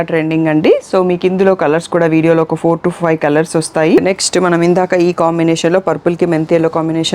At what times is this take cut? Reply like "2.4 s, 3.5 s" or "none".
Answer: 4.0 s